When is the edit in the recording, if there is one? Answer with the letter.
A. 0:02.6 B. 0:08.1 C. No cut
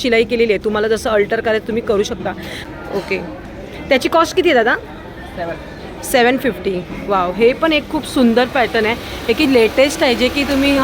A